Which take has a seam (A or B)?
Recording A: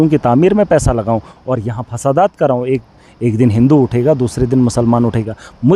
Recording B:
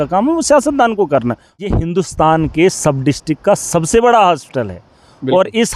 B